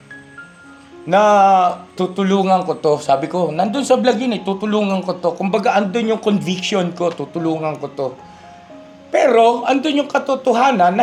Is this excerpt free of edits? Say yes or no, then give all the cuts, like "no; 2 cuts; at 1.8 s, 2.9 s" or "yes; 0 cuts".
yes; 0 cuts